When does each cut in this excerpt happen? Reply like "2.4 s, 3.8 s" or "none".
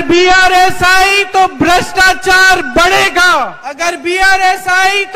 3.6 s